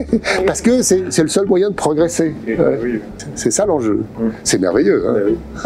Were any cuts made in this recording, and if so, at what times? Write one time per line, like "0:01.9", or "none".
none